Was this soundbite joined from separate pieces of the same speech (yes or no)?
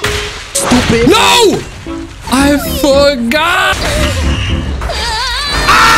no